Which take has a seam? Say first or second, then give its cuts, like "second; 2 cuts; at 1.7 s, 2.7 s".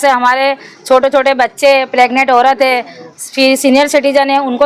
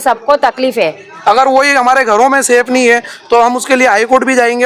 second; 1 cut; at 1.1 s